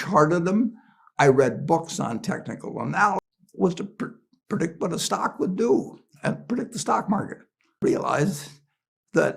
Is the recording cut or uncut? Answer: cut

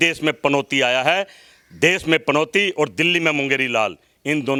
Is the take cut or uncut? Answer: uncut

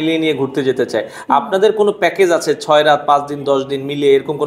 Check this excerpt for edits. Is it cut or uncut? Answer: uncut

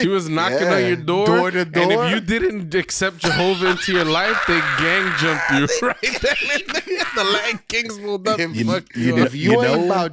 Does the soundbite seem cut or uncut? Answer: uncut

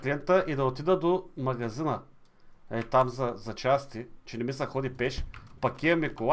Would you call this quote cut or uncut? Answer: uncut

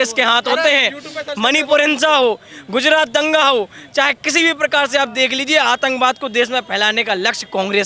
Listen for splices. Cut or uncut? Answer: uncut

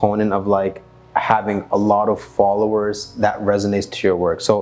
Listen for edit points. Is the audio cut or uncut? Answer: uncut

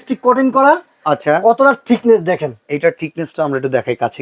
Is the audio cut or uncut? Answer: uncut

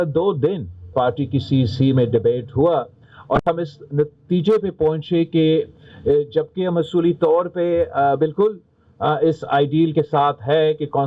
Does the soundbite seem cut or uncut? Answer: cut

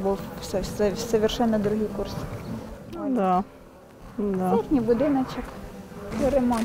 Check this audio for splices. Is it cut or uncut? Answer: uncut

